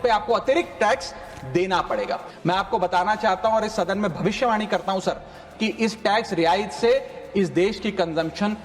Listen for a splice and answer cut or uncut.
cut